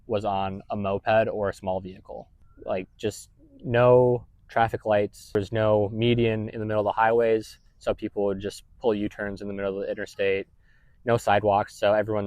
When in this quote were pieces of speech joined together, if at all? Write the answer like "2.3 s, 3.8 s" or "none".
2.3 s, 5.4 s